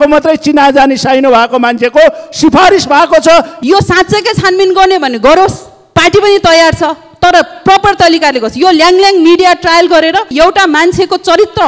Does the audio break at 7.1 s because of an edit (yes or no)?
no